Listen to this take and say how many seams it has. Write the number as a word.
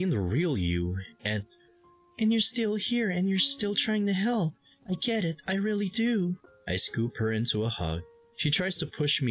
one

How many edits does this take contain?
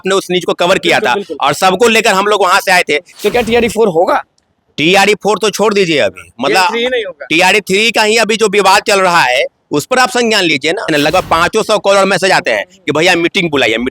two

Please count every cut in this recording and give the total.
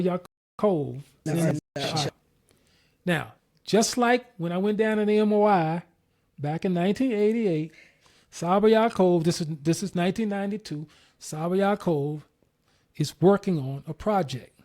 zero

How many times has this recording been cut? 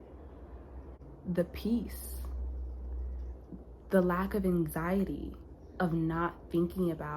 one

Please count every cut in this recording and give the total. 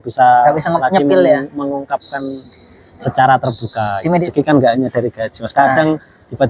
one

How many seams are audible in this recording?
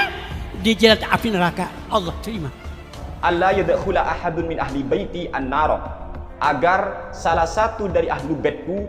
one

